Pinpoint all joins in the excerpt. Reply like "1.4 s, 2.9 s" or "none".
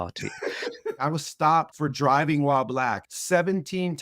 1.0 s, 1.7 s, 3.1 s